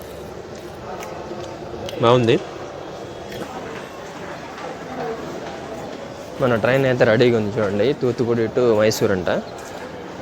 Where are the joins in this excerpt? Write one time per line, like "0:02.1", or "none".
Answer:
0:03.4